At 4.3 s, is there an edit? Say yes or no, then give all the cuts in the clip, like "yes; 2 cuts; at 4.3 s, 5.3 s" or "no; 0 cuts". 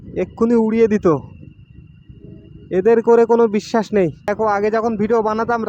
yes; 1 cut; at 4.3 s